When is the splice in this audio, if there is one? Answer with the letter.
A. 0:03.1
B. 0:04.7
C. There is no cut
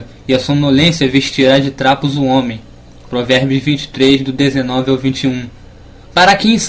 B